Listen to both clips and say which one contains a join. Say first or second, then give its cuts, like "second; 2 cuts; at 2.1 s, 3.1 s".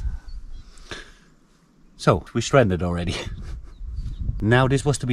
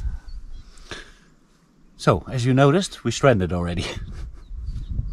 first; 2 cuts; at 2.3 s, 4.3 s